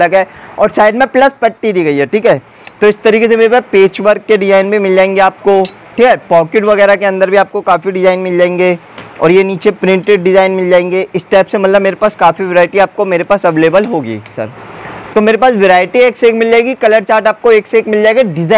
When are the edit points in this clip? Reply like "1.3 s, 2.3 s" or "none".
14.5 s